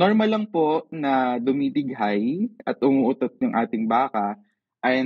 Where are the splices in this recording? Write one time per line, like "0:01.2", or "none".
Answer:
none